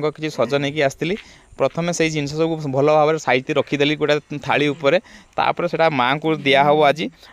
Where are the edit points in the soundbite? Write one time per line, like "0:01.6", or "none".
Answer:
none

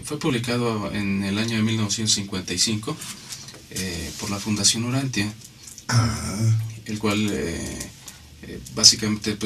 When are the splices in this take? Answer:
0:03.3

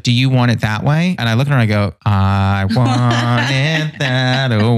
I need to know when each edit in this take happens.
0:01.2
0:02.0

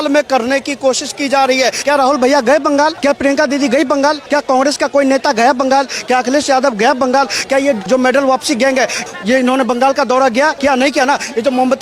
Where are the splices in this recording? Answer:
0:01.8
0:03.0
0:04.2
0:07.8
0:09.1
0:10.6

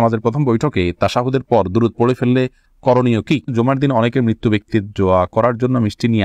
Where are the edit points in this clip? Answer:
0:03.5

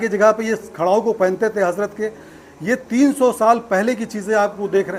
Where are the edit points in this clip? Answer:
none

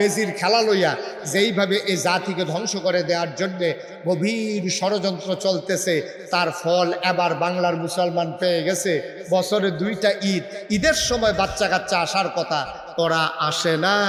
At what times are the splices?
none

